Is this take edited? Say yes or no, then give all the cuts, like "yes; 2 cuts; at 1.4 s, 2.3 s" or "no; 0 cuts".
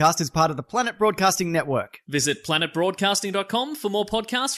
no; 0 cuts